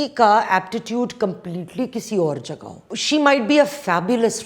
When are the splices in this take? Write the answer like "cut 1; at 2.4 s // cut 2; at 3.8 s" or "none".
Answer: cut 1; at 2.9 s